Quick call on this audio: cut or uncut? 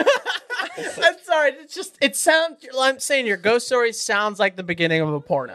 uncut